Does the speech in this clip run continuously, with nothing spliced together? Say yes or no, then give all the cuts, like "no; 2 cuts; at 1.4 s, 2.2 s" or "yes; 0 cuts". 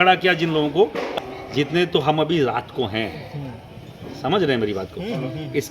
no; 1 cut; at 1.1 s